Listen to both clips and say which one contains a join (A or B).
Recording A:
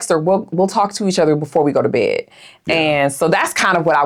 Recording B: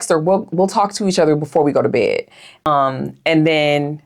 B